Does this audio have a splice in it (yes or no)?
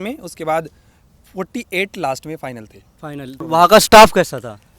yes